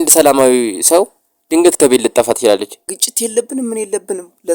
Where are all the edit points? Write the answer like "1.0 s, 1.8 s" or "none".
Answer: 2.8 s